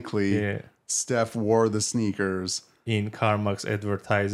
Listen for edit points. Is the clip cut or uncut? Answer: uncut